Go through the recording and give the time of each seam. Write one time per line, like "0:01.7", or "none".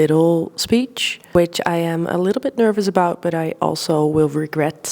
0:01.3